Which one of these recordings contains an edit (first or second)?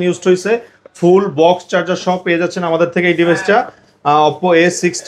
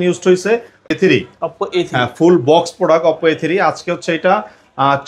second